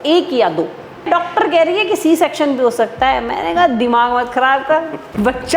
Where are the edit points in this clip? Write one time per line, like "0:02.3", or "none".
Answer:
0:00.9